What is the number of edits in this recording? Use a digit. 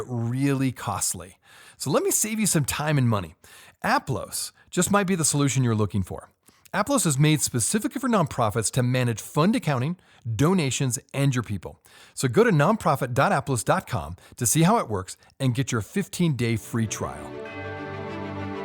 1